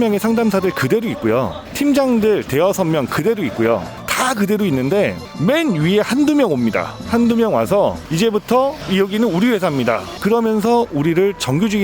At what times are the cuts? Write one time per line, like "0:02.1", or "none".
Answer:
0:03.9
0:10.2